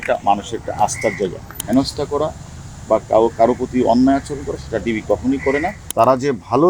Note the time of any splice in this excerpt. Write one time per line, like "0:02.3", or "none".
0:01.5
0:05.8